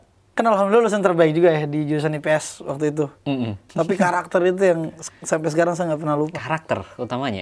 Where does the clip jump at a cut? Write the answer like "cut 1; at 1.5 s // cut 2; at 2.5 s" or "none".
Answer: cut 1; at 3.6 s